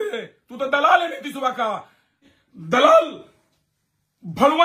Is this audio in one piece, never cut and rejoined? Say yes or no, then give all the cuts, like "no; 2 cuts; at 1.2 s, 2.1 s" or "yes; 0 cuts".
no; 1 cut; at 2.3 s